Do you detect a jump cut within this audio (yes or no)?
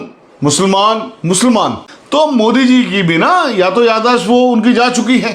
yes